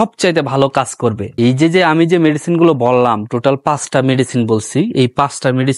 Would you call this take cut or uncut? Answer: cut